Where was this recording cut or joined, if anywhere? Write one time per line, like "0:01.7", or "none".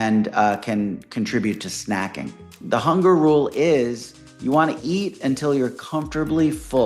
0:02.5